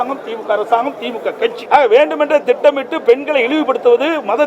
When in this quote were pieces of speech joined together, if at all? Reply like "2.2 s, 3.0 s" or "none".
1.6 s